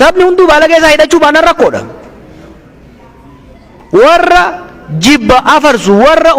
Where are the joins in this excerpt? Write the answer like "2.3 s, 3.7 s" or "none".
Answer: none